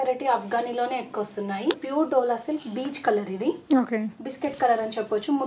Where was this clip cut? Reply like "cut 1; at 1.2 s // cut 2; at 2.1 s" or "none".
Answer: cut 1; at 1.8 s

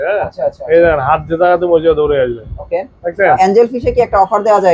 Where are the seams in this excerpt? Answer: cut 1; at 3.4 s

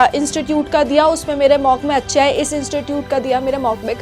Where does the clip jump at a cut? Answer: none

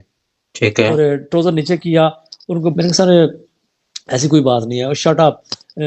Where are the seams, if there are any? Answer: cut 1; at 2.7 s

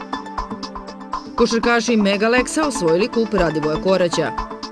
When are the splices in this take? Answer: none

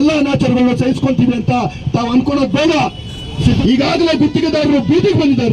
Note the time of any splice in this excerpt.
cut 1; at 3.6 s

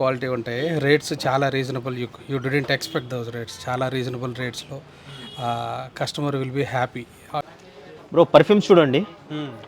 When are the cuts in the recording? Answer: cut 1; at 7.5 s

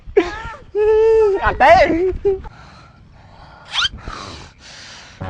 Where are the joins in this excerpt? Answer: cut 1; at 2.5 s

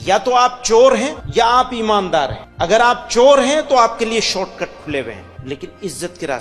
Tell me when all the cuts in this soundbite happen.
cut 1; at 1.2 s // cut 2; at 2.4 s // cut 3; at 5.3 s

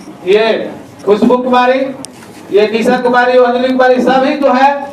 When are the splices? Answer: cut 1; at 3.5 s

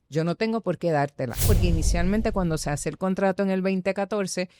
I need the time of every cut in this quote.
cut 1; at 1.5 s

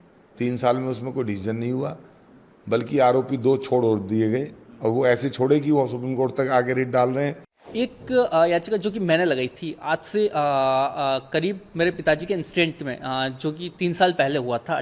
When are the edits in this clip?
cut 1; at 7.6 s

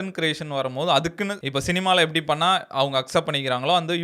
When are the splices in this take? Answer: none

